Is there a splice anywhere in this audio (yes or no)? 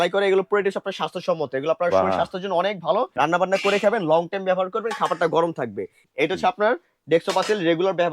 yes